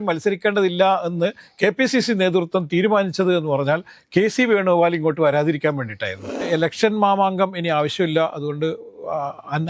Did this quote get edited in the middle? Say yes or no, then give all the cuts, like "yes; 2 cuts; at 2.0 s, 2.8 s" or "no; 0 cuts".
yes; 1 cut; at 6.5 s